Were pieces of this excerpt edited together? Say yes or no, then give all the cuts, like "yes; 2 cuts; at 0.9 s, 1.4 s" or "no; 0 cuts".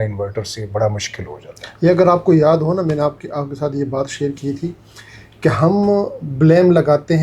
no; 0 cuts